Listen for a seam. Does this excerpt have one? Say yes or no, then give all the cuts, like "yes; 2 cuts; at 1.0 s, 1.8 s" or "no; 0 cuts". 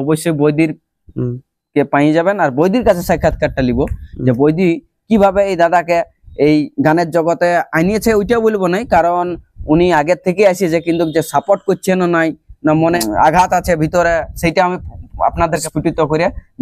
yes; 2 cuts; at 13.0 s, 15.6 s